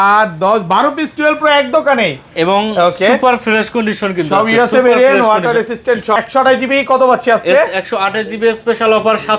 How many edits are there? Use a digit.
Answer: 1